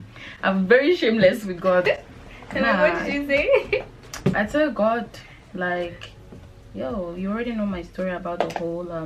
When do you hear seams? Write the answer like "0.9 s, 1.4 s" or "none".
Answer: none